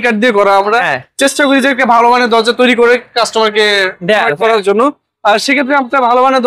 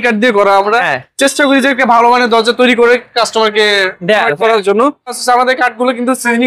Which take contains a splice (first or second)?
second